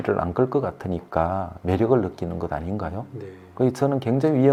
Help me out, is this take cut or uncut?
uncut